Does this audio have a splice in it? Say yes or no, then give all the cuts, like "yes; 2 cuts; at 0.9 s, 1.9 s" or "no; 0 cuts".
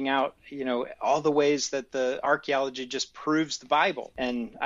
no; 0 cuts